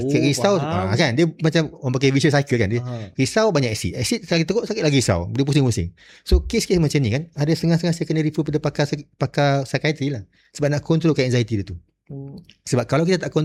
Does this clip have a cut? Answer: no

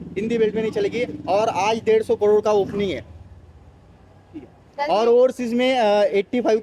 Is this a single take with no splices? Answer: yes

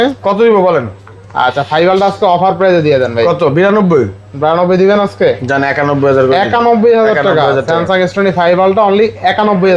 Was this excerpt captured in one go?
yes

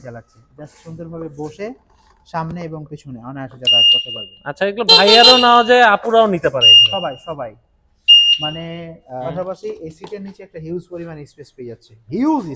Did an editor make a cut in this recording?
yes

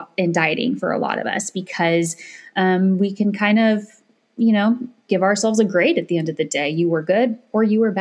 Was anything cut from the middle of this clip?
no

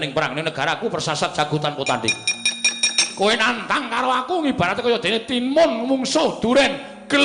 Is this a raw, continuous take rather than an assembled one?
yes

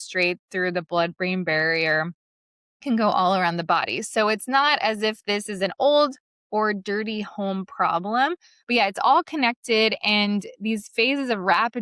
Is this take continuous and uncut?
no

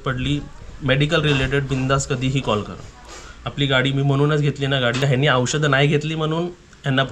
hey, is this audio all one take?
no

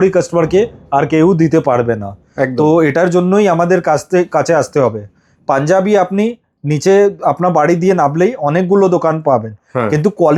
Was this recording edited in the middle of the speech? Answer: no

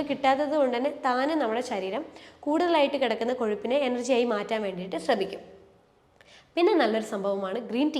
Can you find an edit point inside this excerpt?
no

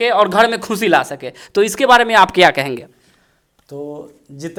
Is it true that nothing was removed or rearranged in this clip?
yes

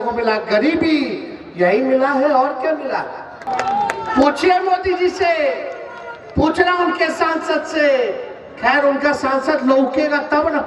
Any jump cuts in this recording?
yes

